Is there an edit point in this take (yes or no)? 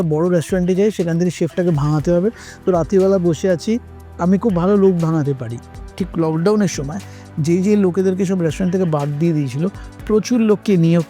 yes